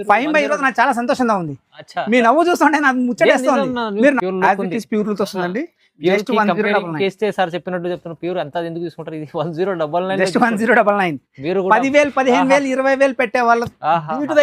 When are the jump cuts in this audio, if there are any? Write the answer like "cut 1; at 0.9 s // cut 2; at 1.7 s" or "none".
cut 1; at 4.2 s